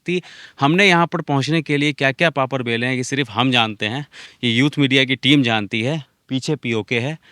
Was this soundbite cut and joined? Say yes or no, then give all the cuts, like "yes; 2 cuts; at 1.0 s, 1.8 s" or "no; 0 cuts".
no; 0 cuts